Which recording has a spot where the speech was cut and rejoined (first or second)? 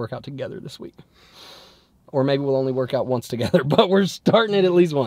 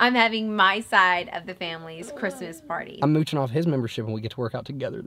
second